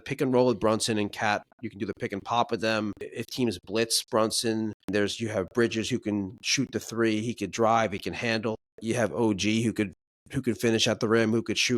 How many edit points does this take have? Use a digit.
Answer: 3